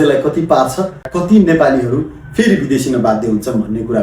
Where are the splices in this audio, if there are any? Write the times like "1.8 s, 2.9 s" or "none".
1.1 s